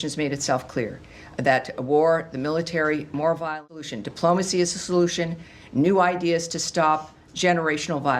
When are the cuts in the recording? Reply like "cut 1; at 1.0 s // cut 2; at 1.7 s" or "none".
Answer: cut 1; at 3.9 s